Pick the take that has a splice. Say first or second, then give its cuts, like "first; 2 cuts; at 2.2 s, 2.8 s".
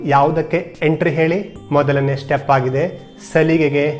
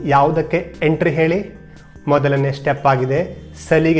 first; 1 cut; at 1.5 s